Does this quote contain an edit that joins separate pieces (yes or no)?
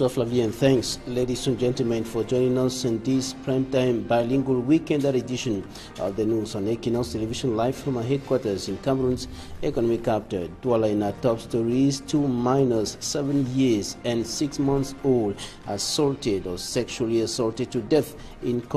no